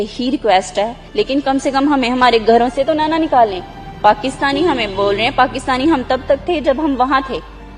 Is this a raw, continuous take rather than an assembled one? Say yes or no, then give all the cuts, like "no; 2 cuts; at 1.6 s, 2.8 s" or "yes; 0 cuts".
no; 1 cut; at 1.0 s